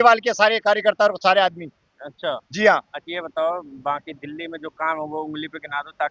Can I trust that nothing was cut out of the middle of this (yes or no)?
yes